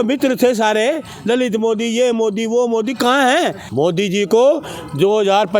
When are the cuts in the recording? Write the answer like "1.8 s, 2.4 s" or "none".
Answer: 3.6 s